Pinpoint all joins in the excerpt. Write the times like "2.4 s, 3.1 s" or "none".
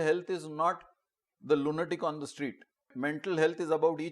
2.9 s